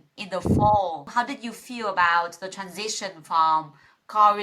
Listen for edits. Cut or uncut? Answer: cut